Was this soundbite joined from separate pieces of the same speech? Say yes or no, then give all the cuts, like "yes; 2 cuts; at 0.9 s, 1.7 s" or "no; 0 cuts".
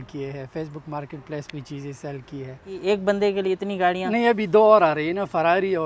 yes; 1 cut; at 2.7 s